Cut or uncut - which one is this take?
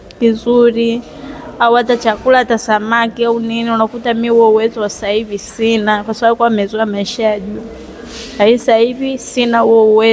uncut